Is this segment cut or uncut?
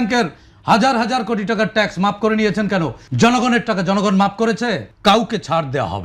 cut